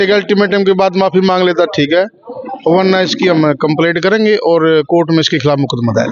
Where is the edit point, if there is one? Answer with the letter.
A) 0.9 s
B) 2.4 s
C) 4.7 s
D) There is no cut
D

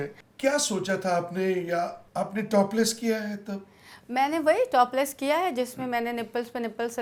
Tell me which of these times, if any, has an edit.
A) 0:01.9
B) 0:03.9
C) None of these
C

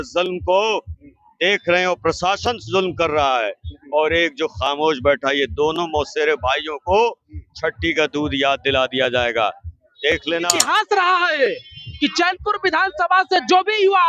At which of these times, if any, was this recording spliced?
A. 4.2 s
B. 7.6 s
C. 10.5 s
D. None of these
C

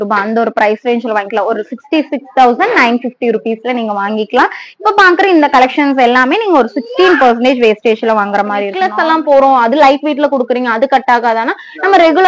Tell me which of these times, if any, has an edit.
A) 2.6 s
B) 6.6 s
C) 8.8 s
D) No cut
C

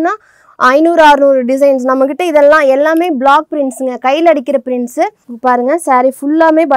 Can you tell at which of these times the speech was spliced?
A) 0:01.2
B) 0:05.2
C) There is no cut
B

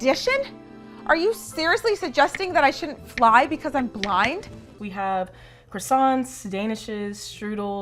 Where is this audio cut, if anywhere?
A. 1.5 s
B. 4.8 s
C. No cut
B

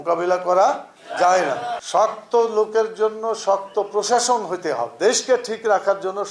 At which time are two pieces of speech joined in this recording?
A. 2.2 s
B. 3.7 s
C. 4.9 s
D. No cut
C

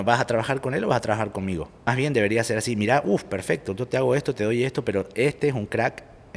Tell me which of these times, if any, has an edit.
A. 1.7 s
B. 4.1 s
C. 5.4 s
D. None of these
A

